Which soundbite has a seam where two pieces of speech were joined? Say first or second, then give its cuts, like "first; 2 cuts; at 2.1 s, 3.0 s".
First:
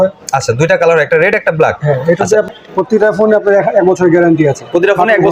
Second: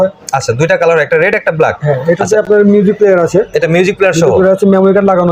first; 1 cut; at 2.5 s